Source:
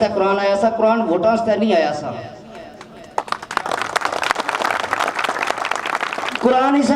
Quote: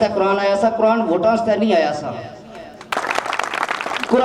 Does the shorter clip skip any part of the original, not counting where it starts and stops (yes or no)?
yes